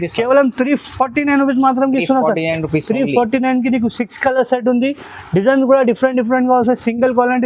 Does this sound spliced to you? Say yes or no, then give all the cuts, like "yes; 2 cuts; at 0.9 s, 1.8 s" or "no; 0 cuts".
no; 0 cuts